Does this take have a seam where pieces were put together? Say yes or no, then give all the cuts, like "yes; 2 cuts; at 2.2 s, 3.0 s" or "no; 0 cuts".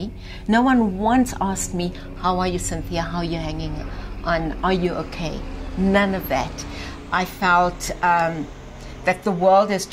no; 0 cuts